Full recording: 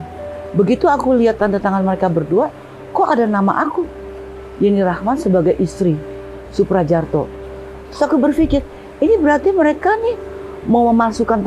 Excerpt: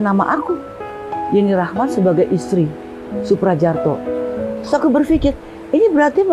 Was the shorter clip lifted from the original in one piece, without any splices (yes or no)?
yes